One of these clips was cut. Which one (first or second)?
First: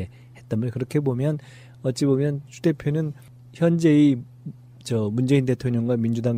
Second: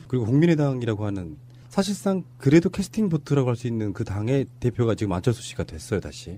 first